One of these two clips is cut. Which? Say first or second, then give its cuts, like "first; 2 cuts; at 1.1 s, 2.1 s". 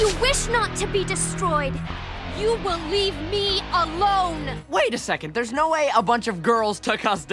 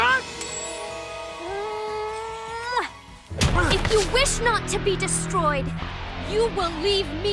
first; 1 cut; at 4.5 s